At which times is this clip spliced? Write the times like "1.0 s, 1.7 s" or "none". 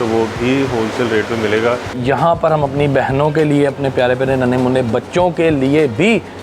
2.0 s